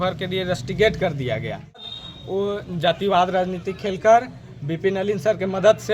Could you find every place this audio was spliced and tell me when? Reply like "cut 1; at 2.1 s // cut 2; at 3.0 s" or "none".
cut 1; at 1.9 s